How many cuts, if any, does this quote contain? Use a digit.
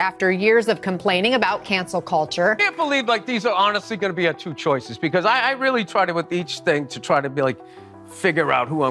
1